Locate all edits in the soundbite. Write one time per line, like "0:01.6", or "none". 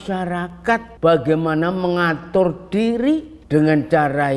0:00.9
0:03.3